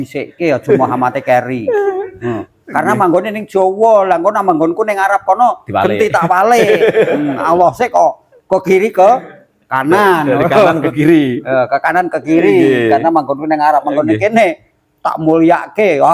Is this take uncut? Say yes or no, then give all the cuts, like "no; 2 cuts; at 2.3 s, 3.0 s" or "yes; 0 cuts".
yes; 0 cuts